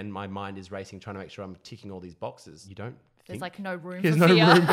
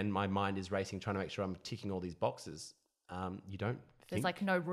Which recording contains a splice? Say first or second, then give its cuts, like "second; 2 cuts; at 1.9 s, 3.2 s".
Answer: first; 1 cut; at 2.6 s